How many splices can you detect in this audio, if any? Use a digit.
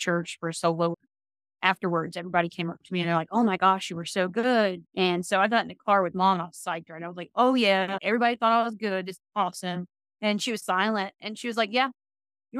2